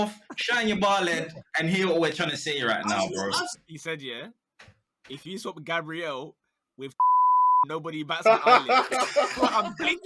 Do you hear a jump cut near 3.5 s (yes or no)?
yes